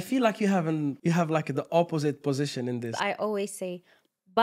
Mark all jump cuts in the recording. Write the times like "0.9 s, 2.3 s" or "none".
1.0 s, 2.9 s